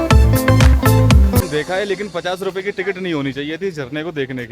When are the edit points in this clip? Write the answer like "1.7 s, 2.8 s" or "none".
1.4 s